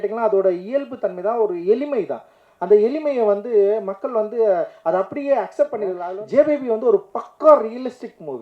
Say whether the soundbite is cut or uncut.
cut